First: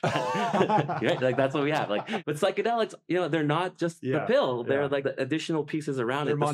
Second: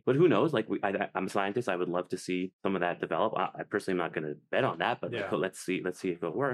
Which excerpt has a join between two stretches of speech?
first; 2 cuts; at 2.2 s, 5.0 s

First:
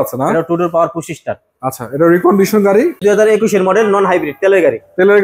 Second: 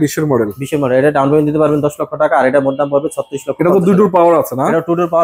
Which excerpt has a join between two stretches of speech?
first; 1 cut; at 3.0 s

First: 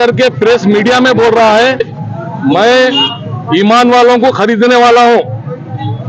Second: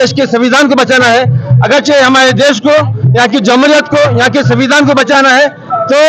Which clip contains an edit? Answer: first; 1 cut; at 2.0 s

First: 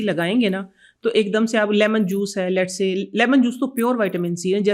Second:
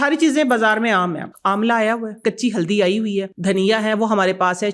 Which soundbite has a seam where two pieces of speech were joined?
second; 3 cuts; at 1.3 s, 2.2 s, 3.3 s

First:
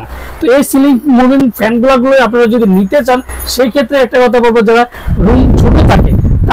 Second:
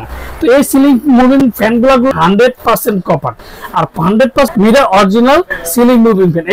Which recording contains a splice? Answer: second; 2 cuts; at 2.1 s, 4.5 s

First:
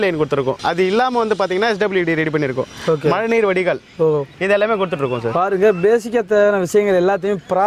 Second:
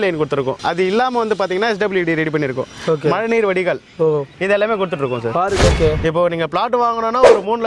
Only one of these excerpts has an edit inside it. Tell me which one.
second; 1 cut; at 5.6 s

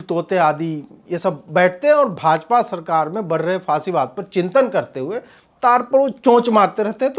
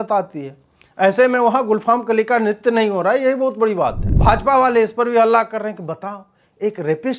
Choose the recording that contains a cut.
second; 1 cut; at 4.1 s

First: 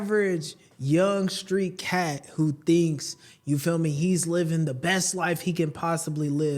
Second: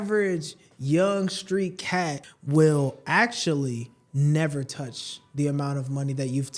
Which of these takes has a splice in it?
second; 1 cut; at 2.2 s

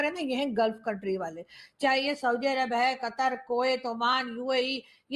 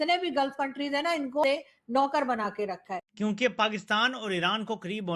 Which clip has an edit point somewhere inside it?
second; 2 cuts; at 1.4 s, 3.1 s

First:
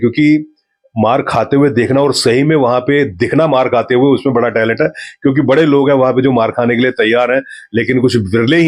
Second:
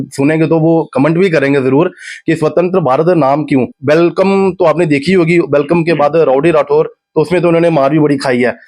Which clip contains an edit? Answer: second; 1 cut; at 3.7 s

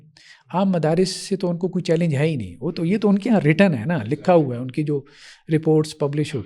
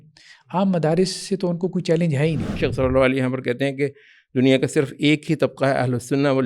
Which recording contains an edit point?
second; 1 cut; at 2.6 s

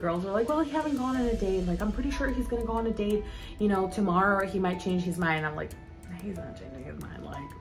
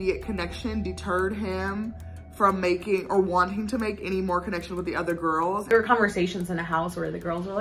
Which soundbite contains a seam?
second; 1 cut; at 5.6 s

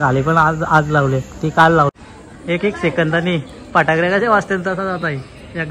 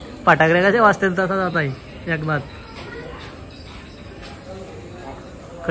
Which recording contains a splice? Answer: first; 1 cut; at 1.9 s

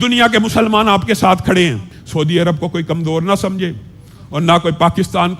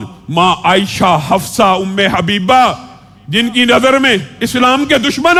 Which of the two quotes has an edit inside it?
first; 1 cut; at 2.0 s

